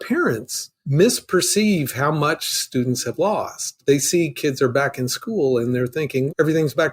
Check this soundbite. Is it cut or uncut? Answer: cut